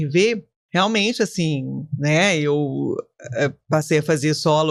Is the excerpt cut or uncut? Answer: uncut